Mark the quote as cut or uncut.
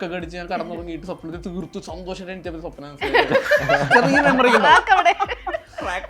uncut